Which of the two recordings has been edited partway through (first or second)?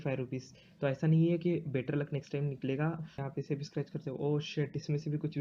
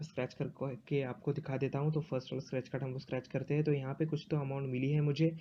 first